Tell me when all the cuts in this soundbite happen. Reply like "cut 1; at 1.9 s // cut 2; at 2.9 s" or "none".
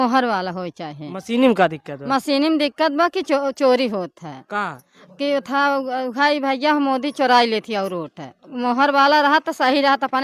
none